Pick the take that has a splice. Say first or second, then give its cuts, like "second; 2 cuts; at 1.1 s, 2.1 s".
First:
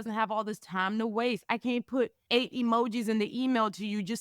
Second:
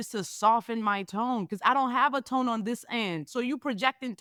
first; 1 cut; at 2.2 s